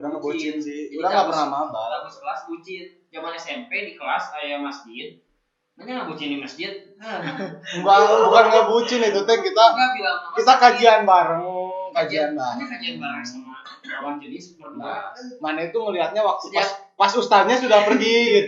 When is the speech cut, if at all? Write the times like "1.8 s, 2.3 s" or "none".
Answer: none